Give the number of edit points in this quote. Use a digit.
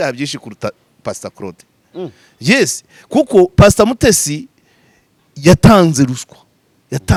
0